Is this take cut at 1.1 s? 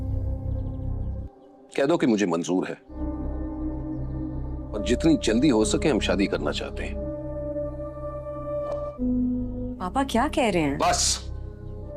yes; 1 cut; at 1.1 s

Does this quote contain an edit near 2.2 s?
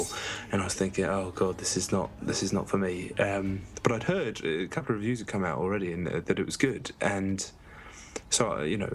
yes; 1 cut; at 2.2 s

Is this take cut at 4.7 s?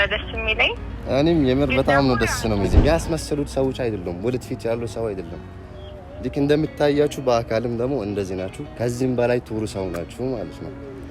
no; 1 cut; at 2.7 s

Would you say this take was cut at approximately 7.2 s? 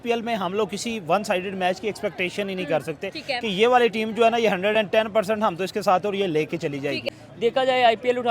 yes; 1 cut; at 7.2 s

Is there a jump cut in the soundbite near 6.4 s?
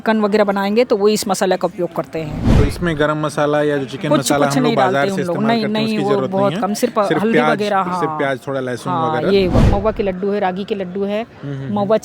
no; 2 cuts; at 2.4 s, 9.7 s

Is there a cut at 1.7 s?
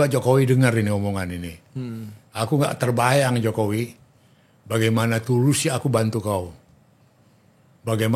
no; 0 cuts

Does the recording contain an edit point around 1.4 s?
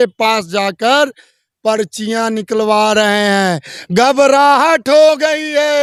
no; 0 cuts

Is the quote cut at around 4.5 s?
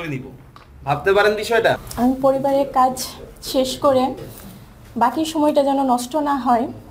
no; 1 cut; at 1.9 s

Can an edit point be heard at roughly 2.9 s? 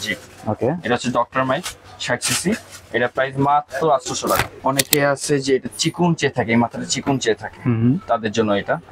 no; 2 cuts; at 0.8 s, 4.5 s

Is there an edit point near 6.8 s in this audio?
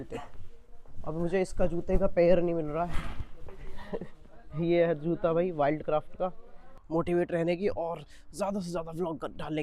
yes; 1 cut; at 6.8 s

